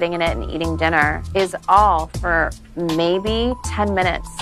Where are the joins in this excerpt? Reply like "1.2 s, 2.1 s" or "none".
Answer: none